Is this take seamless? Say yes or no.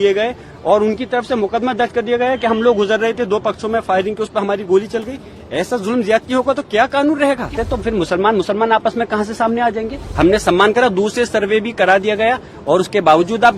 no